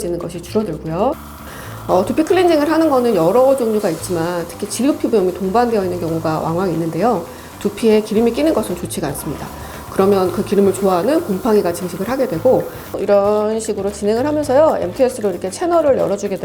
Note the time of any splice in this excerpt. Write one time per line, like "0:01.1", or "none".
0:01.3
0:12.9